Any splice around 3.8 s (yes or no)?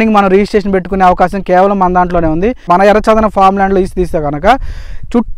no